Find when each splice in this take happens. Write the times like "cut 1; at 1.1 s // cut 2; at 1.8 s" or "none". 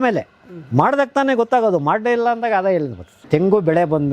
cut 1; at 3.2 s

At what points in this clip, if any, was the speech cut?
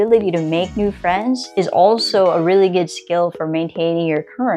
none

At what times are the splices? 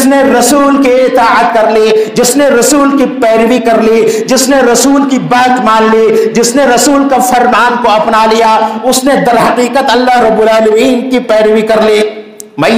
none

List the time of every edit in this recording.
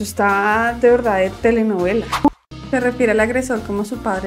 cut 1; at 2.3 s

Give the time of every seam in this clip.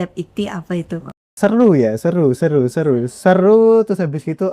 cut 1; at 1.3 s

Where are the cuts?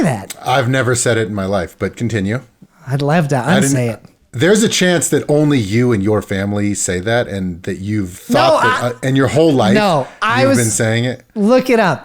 cut 1; at 4.2 s // cut 2; at 8.2 s

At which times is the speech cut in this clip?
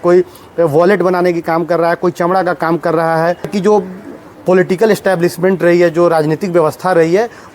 cut 1; at 3.5 s

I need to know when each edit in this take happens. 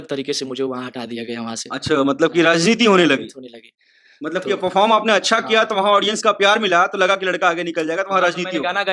none

